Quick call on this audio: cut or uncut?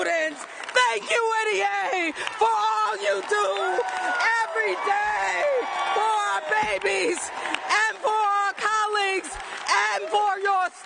cut